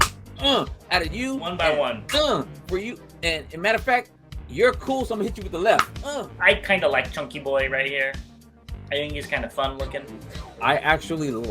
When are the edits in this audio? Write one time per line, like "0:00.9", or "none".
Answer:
0:06.0
0:10.5